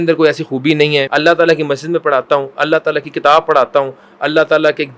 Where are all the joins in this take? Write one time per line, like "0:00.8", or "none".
0:01.1